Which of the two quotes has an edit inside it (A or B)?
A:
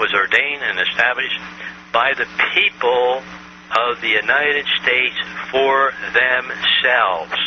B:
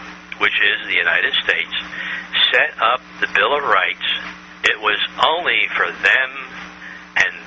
B